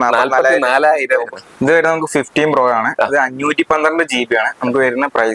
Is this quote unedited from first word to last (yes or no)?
no